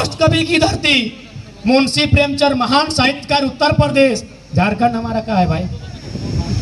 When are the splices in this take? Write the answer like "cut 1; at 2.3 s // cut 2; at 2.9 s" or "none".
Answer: none